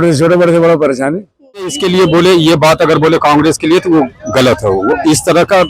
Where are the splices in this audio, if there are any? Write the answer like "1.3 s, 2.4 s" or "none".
1.8 s